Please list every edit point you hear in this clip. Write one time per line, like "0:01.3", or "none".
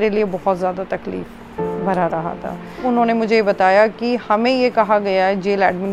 0:02.8